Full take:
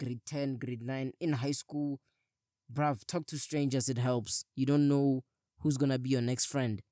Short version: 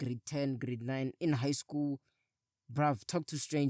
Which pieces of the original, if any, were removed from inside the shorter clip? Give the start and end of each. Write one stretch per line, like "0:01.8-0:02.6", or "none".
none